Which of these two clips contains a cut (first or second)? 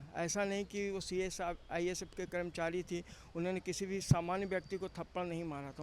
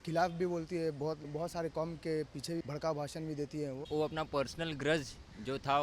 second